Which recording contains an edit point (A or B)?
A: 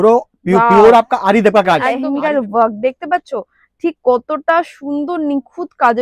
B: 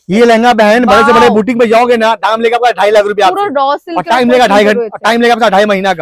A